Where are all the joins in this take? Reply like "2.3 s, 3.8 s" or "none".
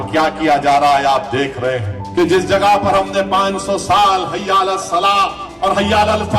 2.0 s